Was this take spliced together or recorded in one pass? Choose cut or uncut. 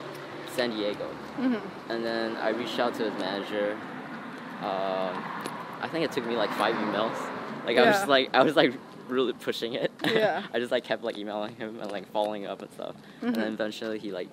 uncut